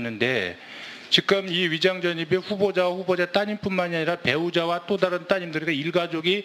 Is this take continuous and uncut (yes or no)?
no